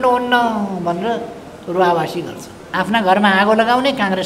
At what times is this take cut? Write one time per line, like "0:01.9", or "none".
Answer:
0:02.7